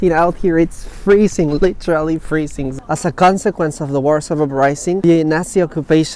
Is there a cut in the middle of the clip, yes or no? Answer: yes